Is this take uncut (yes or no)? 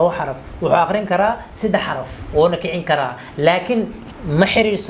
yes